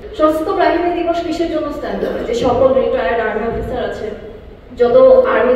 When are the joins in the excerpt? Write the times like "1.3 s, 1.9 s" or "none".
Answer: none